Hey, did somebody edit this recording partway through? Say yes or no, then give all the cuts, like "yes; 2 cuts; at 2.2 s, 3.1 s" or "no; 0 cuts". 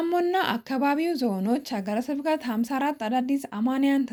no; 0 cuts